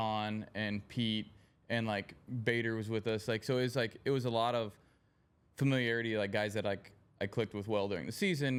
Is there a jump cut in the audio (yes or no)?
no